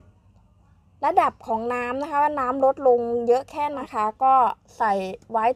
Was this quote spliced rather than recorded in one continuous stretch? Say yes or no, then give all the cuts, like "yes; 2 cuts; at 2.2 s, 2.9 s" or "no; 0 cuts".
yes; 1 cut; at 3.8 s